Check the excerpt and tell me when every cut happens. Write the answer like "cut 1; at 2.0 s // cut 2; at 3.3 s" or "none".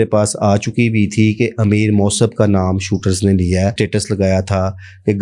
cut 1; at 3.7 s